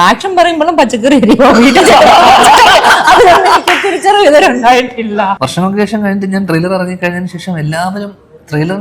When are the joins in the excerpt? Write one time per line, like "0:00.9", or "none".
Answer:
0:05.4